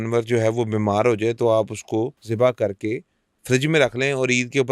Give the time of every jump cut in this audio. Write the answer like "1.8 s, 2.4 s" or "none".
2.2 s